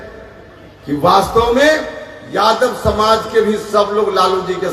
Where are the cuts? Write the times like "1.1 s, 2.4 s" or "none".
none